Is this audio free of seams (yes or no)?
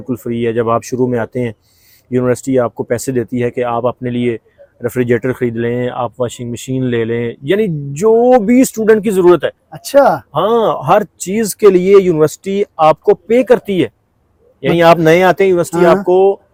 yes